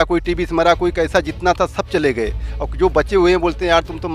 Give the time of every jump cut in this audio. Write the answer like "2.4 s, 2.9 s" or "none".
none